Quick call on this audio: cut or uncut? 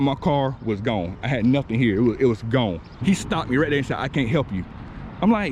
cut